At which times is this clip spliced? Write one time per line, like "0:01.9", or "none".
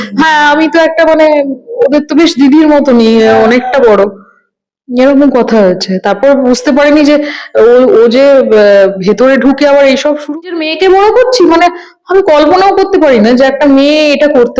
0:10.4